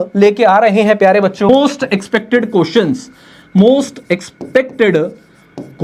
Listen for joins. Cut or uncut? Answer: cut